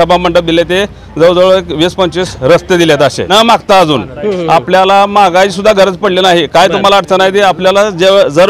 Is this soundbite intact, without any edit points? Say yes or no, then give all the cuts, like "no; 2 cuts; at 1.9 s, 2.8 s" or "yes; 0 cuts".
no; 2 cuts; at 2.3 s, 3.3 s